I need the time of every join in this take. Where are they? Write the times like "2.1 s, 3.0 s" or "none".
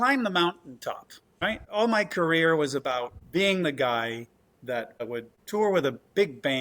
1.2 s, 3.2 s, 5.0 s